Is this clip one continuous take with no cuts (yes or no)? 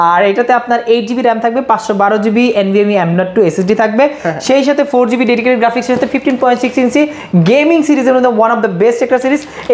yes